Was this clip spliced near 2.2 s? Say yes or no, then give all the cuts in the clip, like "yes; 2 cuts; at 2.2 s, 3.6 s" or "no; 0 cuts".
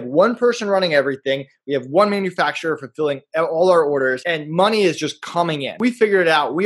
no; 2 cuts; at 4.2 s, 5.7 s